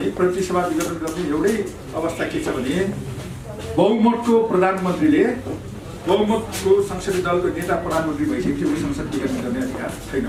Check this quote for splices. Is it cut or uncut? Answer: uncut